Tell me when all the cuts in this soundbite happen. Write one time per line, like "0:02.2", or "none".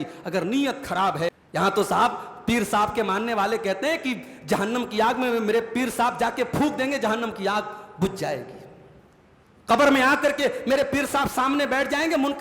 0:01.3